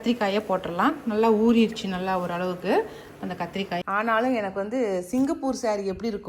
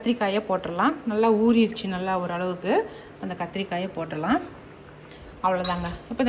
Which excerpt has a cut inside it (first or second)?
first